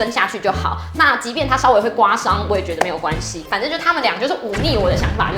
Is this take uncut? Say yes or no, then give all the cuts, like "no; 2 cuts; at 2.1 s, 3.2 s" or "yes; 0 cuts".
yes; 0 cuts